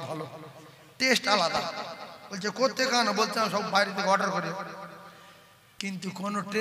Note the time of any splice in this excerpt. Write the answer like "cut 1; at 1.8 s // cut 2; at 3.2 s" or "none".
none